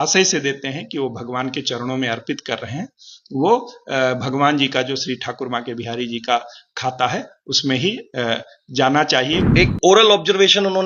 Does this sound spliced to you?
yes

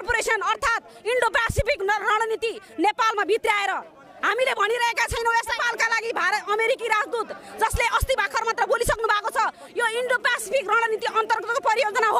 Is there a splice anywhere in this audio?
yes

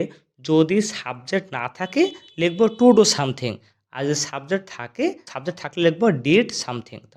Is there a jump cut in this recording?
yes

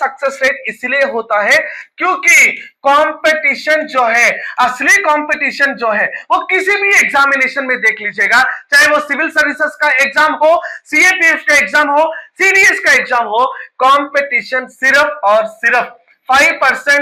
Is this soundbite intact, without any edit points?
yes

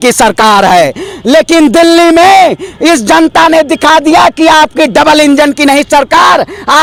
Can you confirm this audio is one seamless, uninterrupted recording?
yes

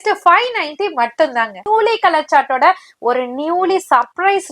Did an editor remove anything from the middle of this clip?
yes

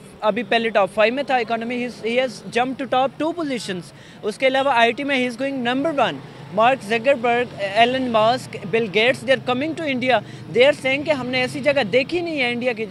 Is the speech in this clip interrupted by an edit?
no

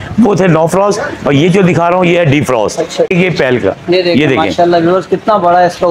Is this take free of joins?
no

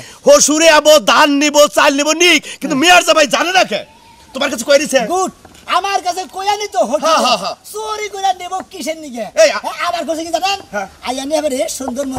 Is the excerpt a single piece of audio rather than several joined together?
yes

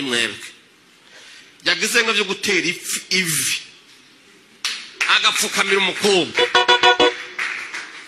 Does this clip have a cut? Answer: no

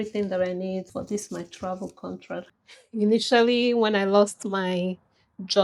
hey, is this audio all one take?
no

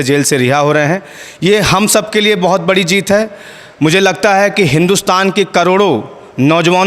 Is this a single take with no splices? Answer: yes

